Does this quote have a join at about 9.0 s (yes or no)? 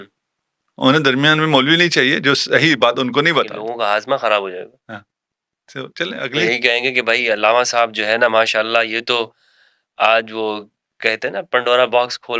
no